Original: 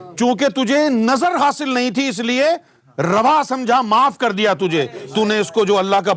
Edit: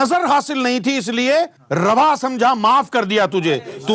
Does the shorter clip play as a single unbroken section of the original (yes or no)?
no